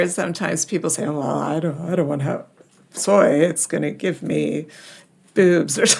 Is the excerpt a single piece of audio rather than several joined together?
yes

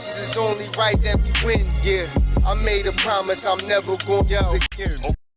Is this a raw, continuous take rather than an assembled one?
yes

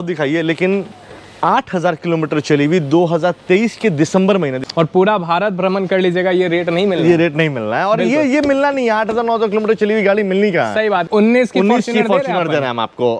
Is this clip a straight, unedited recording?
no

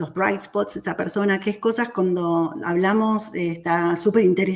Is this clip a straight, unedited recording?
yes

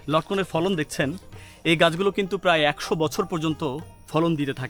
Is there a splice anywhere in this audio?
no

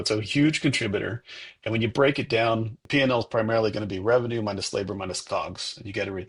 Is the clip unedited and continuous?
no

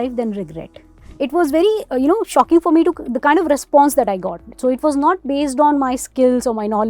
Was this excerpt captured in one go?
no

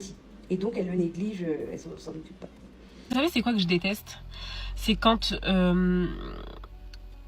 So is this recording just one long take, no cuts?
no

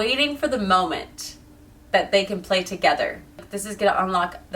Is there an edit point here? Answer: yes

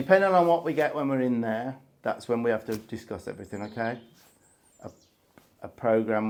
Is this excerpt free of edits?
yes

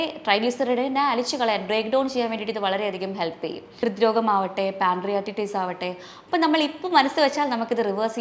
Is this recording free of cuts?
no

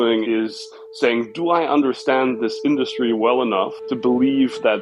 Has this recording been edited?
no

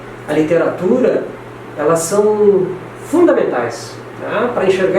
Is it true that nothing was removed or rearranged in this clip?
yes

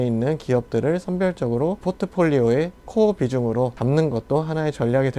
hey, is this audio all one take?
no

